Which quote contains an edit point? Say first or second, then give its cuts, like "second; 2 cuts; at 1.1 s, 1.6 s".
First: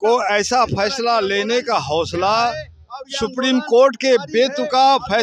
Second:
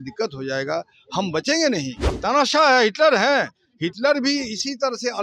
second; 1 cut; at 2.0 s